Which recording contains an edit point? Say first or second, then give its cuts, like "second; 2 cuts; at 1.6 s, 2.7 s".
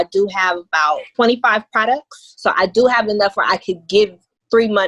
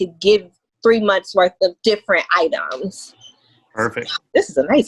first; 1 cut; at 1.1 s